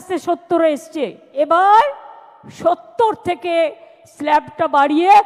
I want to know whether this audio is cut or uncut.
cut